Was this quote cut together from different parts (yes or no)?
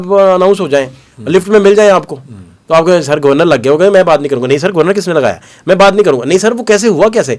no